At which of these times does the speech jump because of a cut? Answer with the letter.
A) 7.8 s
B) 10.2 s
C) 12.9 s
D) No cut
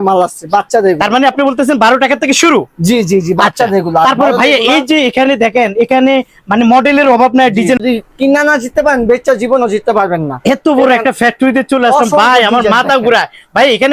A